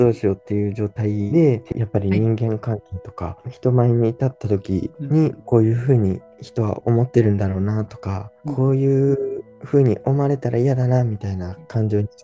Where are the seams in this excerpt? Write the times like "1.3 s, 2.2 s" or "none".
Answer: 1.7 s, 5.4 s